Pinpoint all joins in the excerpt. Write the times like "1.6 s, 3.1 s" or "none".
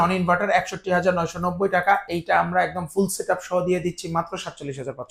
none